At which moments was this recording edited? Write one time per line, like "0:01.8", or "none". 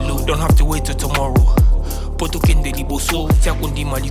none